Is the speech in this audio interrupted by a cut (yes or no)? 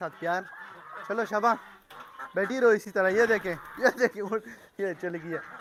no